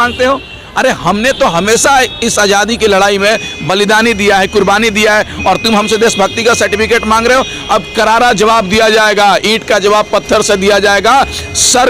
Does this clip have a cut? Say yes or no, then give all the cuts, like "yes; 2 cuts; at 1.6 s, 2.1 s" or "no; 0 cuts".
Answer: no; 0 cuts